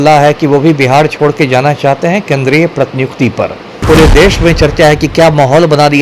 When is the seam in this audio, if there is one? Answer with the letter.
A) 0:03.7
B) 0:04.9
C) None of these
A